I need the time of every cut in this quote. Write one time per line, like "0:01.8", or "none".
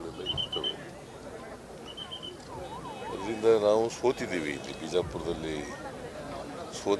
none